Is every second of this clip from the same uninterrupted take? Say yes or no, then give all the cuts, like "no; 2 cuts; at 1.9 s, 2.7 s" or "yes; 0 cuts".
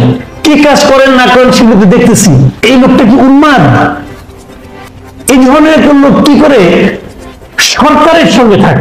no; 1 cut; at 2.6 s